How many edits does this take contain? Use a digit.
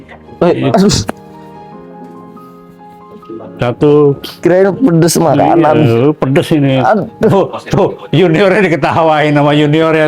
0